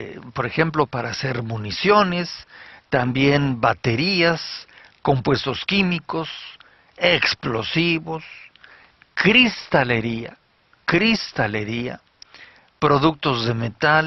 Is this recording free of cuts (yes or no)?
yes